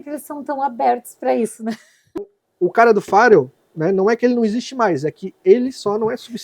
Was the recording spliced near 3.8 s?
no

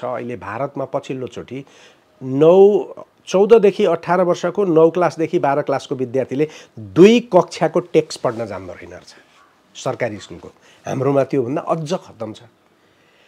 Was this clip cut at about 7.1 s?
no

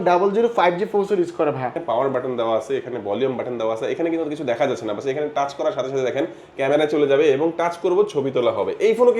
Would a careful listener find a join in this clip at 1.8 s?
yes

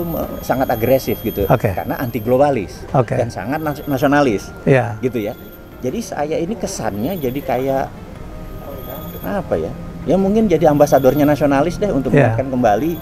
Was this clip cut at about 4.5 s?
no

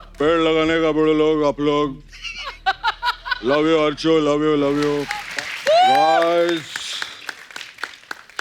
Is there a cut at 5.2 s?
yes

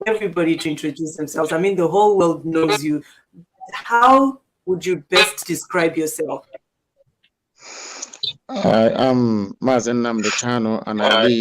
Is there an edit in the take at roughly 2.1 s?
no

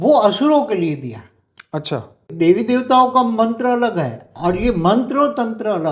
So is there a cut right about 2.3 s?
yes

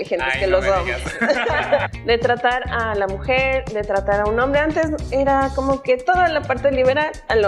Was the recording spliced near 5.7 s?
no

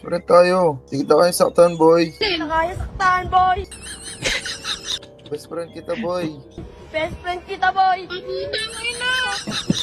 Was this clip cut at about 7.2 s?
no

